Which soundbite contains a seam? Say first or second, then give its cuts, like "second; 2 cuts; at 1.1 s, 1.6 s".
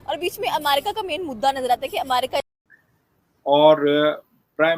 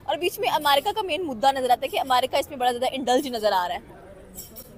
first; 1 cut; at 2.5 s